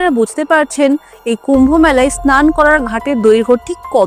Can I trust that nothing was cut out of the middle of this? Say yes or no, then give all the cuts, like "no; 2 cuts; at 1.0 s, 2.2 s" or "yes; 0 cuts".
yes; 0 cuts